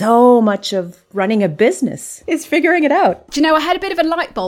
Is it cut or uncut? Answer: cut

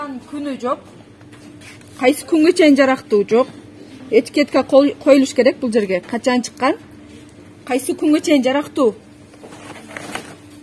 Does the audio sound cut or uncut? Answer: uncut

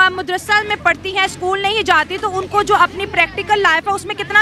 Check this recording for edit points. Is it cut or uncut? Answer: uncut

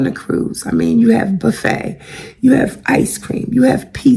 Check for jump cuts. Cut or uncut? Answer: uncut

